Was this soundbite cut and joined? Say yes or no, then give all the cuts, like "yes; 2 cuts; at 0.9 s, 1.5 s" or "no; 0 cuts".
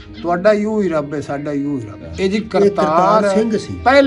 yes; 1 cut; at 2.1 s